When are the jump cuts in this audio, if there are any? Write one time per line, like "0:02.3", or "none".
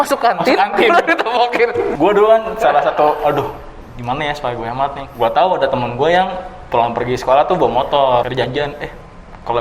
0:01.9
0:05.0
0:08.2